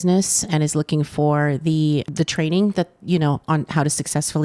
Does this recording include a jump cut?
yes; 1 cut; at 2.1 s

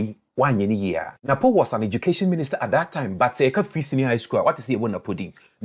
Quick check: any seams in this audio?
yes; 1 cut; at 1.1 s

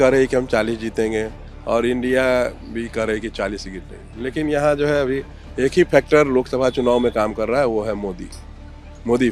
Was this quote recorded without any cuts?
yes; 0 cuts

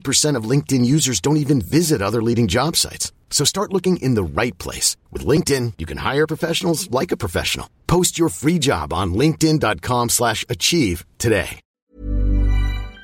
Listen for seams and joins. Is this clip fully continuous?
no; 1 cut; at 11.7 s

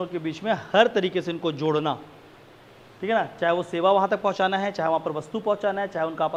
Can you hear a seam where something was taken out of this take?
no; 0 cuts

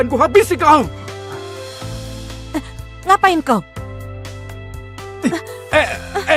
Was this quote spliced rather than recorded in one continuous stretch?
yes; 2 cuts; at 0.9 s, 2.5 s

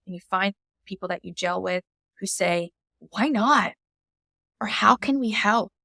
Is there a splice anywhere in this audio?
no; 0 cuts

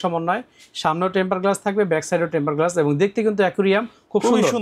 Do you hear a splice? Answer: no; 0 cuts

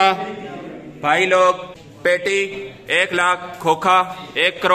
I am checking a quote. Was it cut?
yes; 1 cut; at 1.9 s

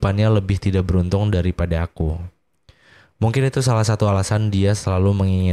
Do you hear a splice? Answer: no; 0 cuts

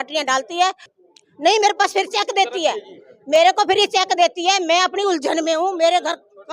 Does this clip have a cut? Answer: yes; 1 cut; at 1.0 s

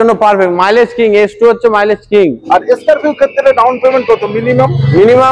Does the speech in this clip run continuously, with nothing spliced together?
no; 1 cut; at 2.4 s

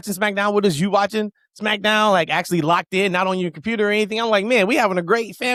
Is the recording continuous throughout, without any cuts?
yes; 0 cuts

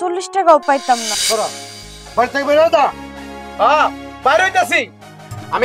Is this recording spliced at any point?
yes; 1 cut; at 1.1 s

